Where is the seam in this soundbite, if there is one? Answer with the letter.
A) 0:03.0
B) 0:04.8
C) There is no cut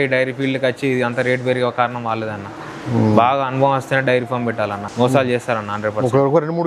B